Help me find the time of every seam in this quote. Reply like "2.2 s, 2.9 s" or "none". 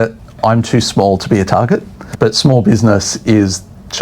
2.0 s